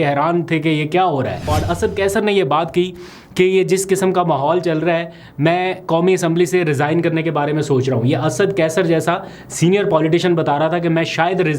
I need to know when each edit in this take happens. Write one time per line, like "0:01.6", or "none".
0:01.5